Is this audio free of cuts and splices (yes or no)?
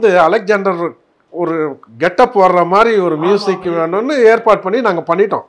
yes